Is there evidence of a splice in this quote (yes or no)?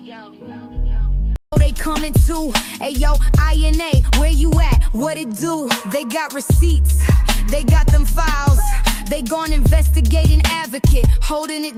no